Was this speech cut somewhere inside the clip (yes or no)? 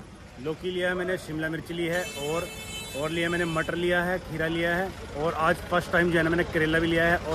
no